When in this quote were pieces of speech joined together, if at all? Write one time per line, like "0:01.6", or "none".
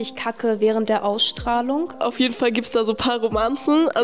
0:01.9